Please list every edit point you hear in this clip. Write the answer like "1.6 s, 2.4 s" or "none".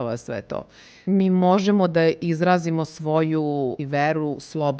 0.9 s, 3.8 s